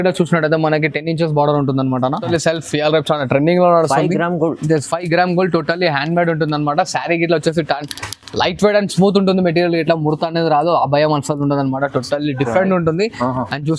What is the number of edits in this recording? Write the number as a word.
one